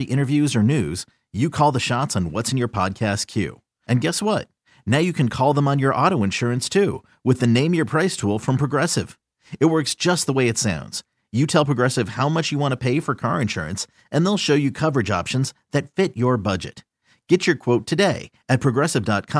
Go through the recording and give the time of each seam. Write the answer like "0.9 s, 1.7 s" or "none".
none